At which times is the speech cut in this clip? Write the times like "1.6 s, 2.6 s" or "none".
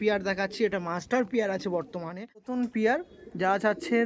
2.5 s